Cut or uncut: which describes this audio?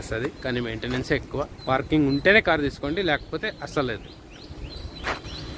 uncut